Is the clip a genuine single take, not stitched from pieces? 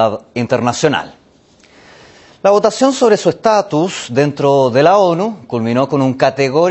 yes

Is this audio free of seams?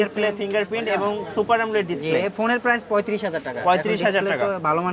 yes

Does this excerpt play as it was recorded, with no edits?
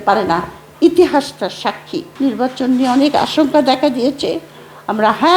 no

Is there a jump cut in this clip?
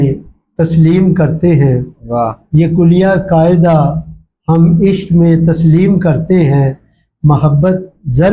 no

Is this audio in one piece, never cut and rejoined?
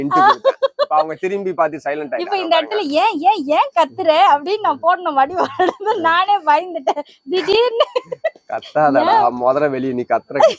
yes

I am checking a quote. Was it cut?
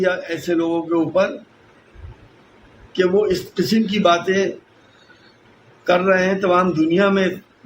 no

